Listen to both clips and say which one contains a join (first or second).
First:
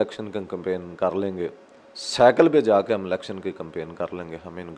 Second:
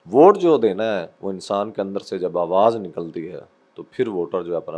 second